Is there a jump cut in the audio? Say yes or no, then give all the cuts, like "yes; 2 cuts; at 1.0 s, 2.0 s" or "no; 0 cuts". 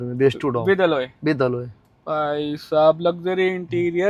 no; 0 cuts